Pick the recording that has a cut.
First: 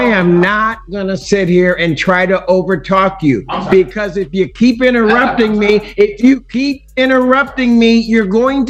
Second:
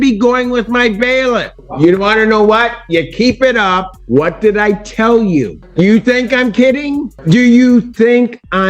second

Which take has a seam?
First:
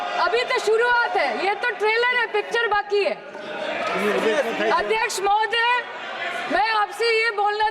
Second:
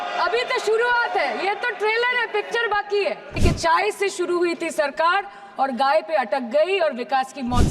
second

